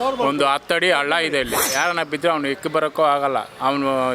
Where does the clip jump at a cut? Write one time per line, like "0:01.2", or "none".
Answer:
0:01.6